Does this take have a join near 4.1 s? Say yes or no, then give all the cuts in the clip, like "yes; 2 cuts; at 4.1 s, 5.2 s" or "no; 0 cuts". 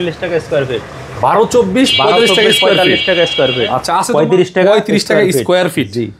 yes; 1 cut; at 4.1 s